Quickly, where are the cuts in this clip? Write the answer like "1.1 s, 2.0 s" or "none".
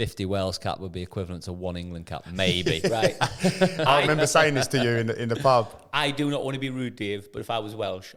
none